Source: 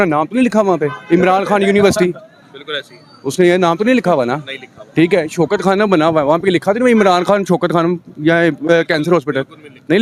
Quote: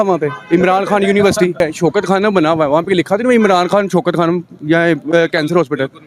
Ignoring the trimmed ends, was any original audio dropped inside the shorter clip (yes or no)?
yes